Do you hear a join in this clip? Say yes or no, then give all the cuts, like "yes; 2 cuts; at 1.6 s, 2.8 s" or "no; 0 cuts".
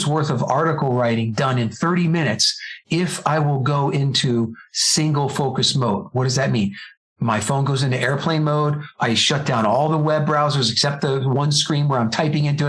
no; 0 cuts